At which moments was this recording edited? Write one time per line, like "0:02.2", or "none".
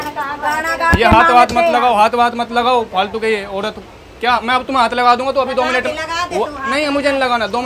none